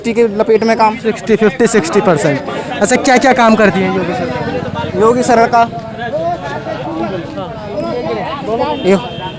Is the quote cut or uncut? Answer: uncut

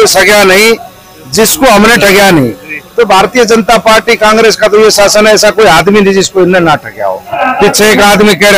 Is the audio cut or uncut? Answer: cut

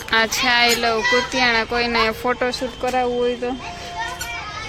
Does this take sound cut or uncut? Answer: uncut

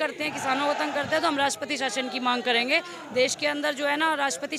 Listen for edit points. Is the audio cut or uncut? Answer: uncut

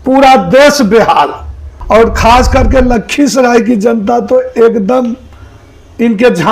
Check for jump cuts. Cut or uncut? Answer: cut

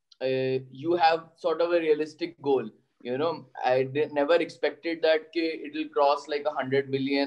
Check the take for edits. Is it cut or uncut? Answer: uncut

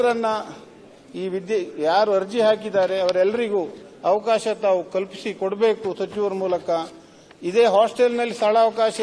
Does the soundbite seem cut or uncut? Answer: uncut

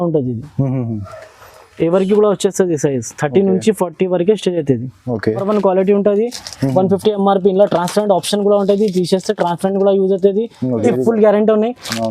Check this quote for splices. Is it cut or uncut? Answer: cut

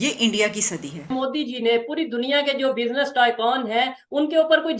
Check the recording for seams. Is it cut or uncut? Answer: cut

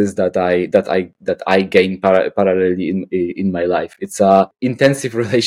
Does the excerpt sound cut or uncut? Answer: cut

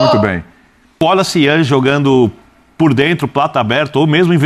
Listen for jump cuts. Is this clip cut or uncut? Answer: cut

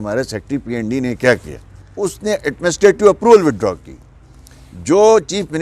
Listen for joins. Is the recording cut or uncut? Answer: cut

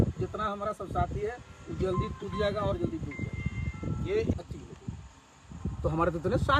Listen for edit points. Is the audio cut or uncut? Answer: cut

